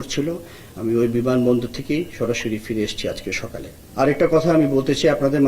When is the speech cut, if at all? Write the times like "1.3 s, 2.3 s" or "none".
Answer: 3.8 s